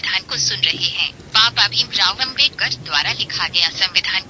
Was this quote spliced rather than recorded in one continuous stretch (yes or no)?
yes